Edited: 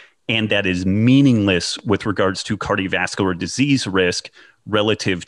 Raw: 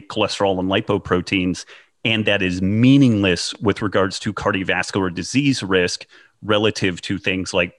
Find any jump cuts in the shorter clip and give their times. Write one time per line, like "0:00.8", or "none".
none